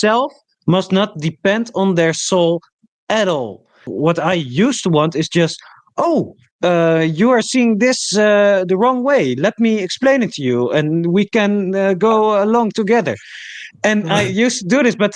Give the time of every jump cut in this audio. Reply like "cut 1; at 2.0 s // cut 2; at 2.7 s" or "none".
cut 1; at 3.8 s